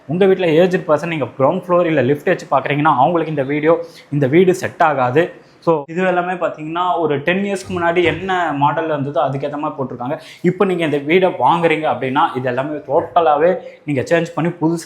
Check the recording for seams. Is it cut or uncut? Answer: cut